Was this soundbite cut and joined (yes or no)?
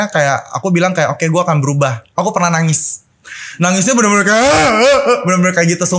yes